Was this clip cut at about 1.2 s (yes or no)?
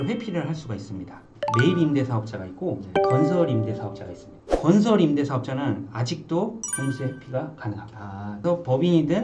yes